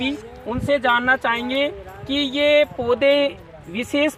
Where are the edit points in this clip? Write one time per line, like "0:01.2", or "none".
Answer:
none